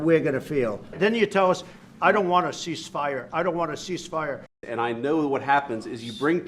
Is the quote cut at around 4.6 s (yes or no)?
yes